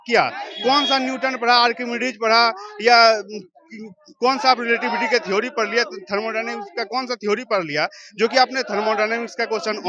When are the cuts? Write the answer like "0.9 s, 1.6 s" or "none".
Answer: none